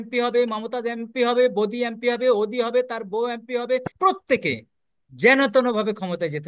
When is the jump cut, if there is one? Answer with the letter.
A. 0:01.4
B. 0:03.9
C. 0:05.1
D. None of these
B